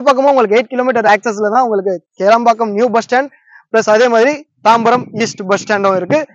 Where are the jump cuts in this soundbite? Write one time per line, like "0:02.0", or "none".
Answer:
none